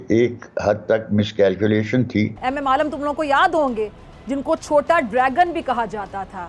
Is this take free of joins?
no; 1 cut; at 2.4 s

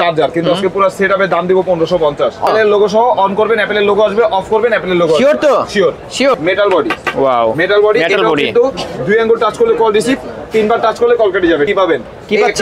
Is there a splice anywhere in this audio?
yes; 3 cuts; at 2.5 s, 6.3 s, 11.7 s

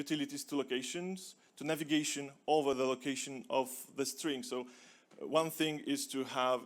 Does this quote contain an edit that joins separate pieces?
yes; 1 cut; at 2.8 s

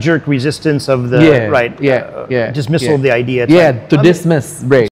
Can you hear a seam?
no; 0 cuts

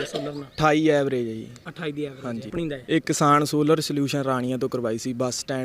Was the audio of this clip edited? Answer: yes; 1 cut; at 2.5 s

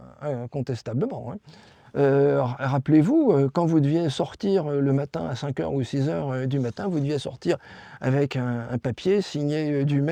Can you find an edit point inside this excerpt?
no; 0 cuts

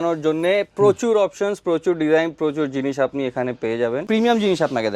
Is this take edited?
yes; 1 cut; at 4.0 s

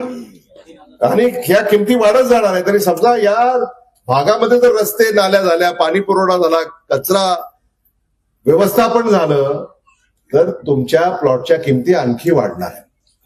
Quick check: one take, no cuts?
yes; 0 cuts

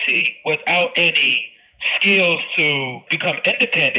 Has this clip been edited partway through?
yes; 1 cut; at 3.0 s

